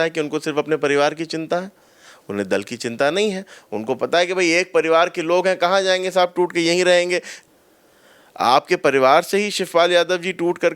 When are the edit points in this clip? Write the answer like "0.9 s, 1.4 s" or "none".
7.3 s